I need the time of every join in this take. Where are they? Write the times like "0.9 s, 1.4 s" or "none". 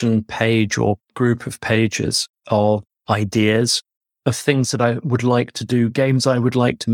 none